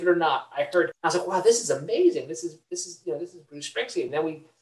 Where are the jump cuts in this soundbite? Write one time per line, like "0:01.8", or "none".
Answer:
0:00.9